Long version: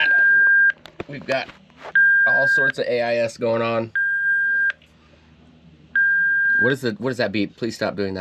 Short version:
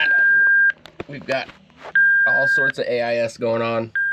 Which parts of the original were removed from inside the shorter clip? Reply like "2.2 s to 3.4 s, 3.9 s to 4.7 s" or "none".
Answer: none